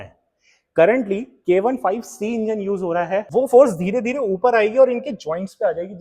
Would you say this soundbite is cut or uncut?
cut